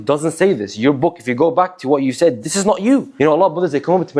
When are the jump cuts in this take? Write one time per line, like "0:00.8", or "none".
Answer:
0:03.1